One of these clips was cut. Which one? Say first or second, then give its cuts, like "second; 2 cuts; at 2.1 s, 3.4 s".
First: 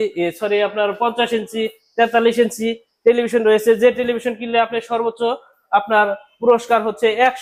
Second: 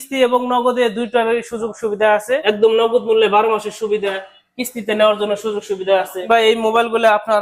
second; 2 cuts; at 2.4 s, 6.2 s